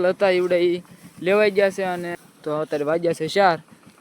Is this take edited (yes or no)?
yes